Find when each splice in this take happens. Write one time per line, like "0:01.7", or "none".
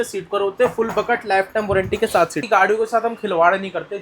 0:02.4